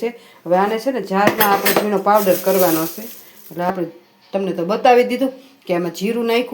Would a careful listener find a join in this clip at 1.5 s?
no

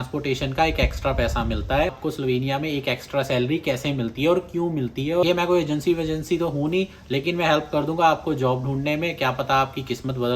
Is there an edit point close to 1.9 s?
yes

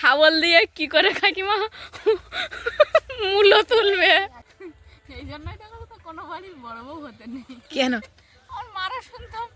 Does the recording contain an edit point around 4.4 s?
yes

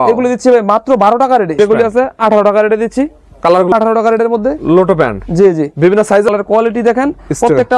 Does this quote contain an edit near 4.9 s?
no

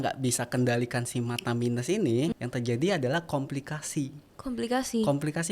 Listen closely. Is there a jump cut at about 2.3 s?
yes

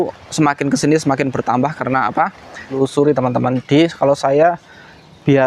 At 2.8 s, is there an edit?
yes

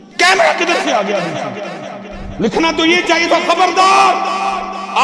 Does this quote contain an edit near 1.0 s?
no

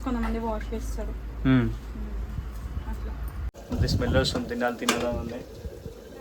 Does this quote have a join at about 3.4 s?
yes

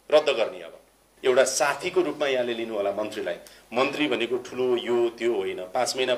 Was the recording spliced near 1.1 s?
yes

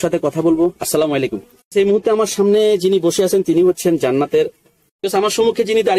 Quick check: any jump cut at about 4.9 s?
yes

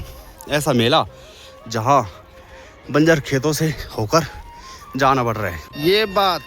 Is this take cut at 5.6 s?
yes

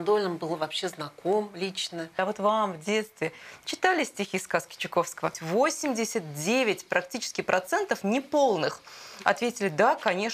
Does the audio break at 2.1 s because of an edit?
yes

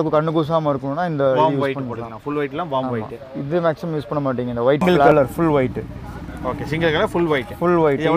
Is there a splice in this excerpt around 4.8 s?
yes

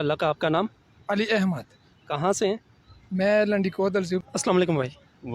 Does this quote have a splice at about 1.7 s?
no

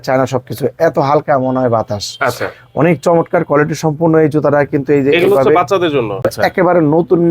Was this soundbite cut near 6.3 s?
yes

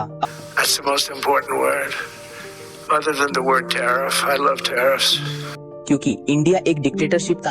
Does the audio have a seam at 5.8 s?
yes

